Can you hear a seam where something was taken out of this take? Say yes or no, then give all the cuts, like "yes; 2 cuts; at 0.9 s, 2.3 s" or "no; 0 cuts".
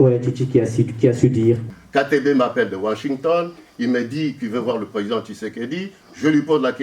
yes; 1 cut; at 1.7 s